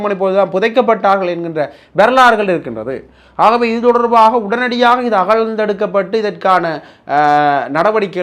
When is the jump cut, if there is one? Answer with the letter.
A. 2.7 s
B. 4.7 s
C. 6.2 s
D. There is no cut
D